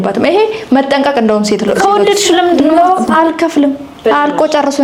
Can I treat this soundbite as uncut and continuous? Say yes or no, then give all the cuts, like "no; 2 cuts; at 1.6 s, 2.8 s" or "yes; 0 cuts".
yes; 0 cuts